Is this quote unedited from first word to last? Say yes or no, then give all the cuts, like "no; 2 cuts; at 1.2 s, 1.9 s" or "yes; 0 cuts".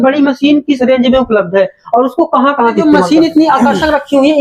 no; 1 cut; at 2.8 s